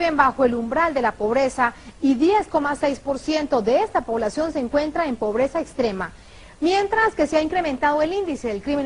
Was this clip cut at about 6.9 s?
no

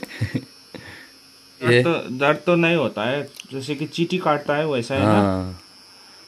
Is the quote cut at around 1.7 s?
yes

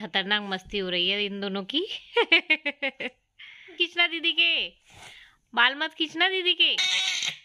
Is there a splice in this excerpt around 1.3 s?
no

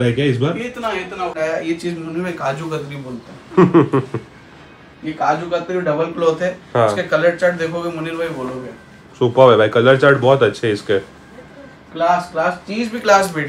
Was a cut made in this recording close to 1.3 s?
yes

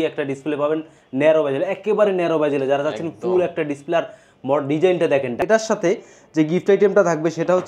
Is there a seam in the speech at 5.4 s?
yes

